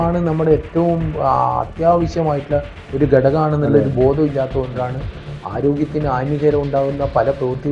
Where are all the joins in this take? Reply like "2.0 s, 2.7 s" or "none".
none